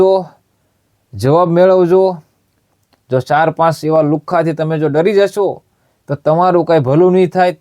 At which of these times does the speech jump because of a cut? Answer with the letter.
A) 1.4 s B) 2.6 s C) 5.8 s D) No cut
B